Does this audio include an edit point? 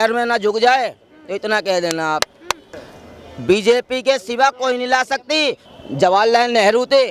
yes; 2 cuts; at 2.6 s, 5.6 s

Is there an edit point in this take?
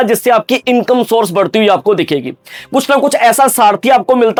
no; 0 cuts

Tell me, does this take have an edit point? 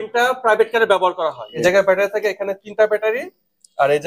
yes; 1 cut; at 1.5 s

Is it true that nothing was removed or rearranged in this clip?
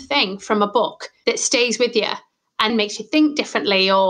no; 2 cuts; at 1.1 s, 2.7 s

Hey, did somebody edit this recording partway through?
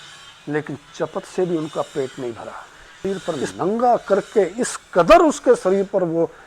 yes; 1 cut; at 3.0 s

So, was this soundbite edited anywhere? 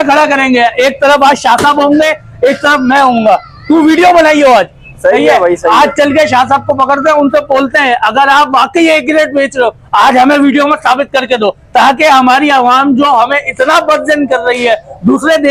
no; 0 cuts

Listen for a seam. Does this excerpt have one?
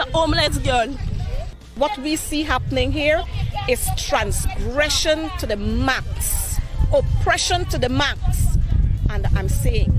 yes; 1 cut; at 1.6 s

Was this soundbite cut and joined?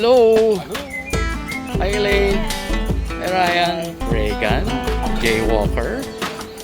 yes; 2 cuts; at 1.6 s, 4.0 s

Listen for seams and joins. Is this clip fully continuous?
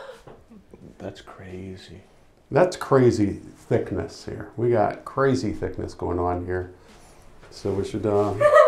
yes; 0 cuts

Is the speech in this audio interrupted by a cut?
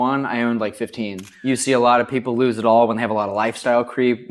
yes; 1 cut; at 1.3 s

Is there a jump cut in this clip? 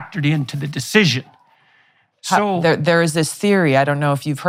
no; 0 cuts

